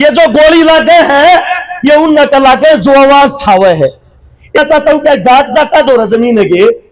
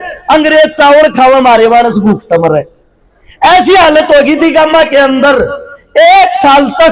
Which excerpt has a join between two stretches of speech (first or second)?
first